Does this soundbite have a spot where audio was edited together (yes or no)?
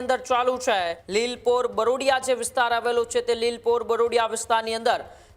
yes